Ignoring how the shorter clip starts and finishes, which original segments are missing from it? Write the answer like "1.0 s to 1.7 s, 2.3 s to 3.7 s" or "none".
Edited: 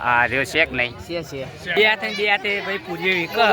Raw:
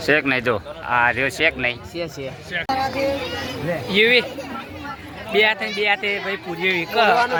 2.5 s to 5.2 s